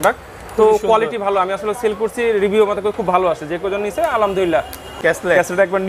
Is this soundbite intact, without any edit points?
no; 1 cut; at 4.9 s

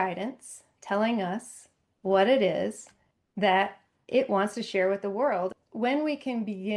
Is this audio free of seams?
no; 1 cut; at 5.6 s

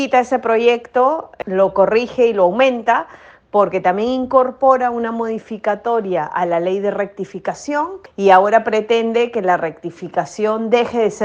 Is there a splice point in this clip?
yes; 2 cuts; at 1.3 s, 8.0 s

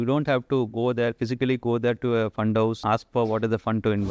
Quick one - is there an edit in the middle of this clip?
yes; 1 cut; at 2.8 s

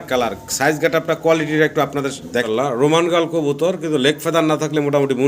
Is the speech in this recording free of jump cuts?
no; 1 cut; at 2.4 s

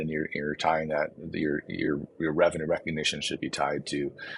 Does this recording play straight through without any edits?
yes; 0 cuts

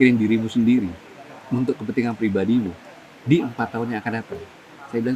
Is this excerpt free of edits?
yes; 0 cuts

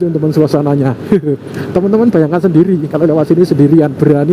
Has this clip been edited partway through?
no; 0 cuts

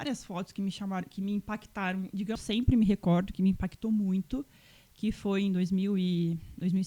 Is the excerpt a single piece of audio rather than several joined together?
no; 1 cut; at 2.4 s

